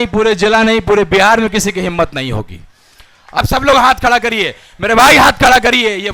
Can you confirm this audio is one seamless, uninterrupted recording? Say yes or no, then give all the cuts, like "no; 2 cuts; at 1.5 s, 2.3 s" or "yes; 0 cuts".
no; 1 cut; at 3.4 s